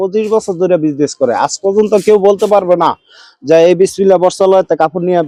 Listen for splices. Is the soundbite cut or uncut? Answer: uncut